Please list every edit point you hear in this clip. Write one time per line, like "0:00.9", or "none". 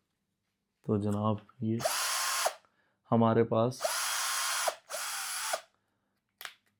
none